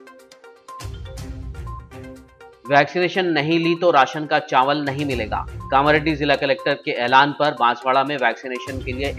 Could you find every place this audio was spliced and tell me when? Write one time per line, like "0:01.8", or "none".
0:01.0